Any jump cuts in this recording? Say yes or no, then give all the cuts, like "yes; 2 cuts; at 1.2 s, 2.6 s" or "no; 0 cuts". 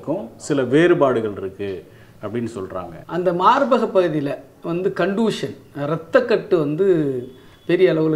yes; 1 cut; at 3.0 s